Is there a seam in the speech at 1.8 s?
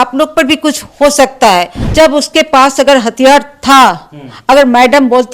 yes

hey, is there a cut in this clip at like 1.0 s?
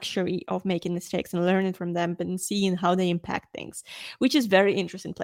no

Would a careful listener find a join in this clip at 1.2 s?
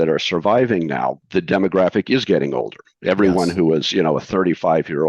yes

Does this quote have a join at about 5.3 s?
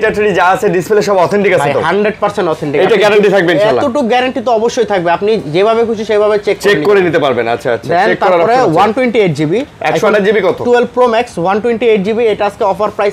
no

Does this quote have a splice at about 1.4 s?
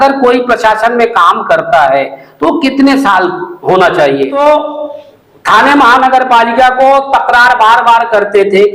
no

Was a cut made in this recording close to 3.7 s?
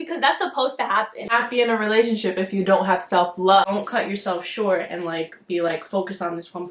yes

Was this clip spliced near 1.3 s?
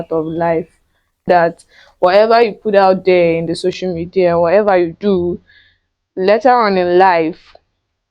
yes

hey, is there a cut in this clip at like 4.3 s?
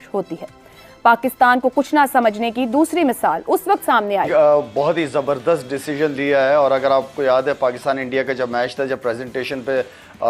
yes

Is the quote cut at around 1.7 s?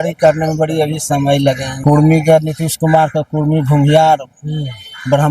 yes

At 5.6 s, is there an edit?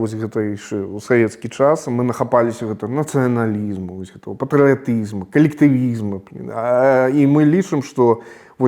no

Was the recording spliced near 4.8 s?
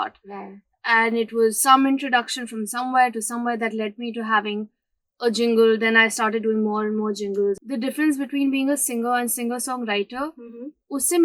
no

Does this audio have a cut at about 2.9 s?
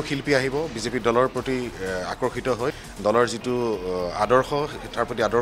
yes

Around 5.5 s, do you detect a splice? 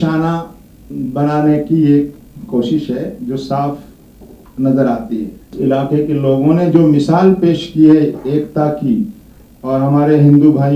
yes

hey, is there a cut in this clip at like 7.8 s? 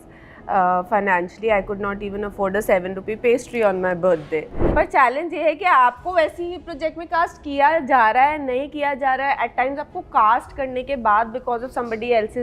no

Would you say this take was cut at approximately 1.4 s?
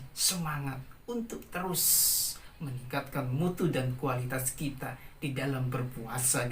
no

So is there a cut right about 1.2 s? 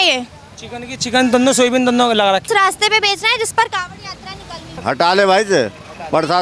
no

